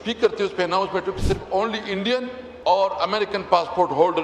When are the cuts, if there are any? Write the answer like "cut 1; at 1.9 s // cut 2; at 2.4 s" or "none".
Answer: cut 1; at 2.4 s